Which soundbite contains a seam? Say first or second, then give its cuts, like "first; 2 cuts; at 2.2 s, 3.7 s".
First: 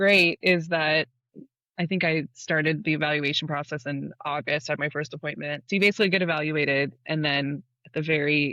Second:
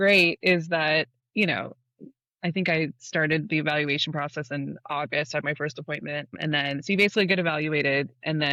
first; 2 cuts; at 1.2 s, 5.6 s